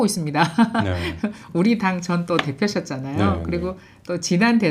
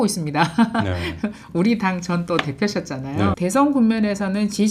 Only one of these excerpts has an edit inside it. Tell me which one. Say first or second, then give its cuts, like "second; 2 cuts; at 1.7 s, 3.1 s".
second; 1 cut; at 3.4 s